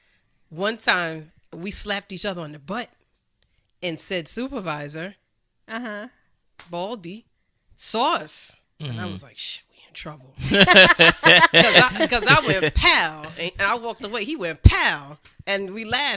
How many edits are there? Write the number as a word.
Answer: zero